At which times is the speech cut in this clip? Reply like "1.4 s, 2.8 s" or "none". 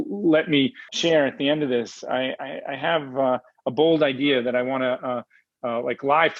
0.9 s